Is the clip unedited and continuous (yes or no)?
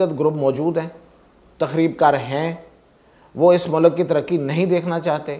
yes